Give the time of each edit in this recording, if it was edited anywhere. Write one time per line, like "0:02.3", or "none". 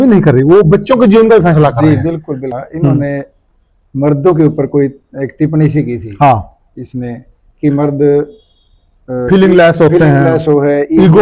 0:02.4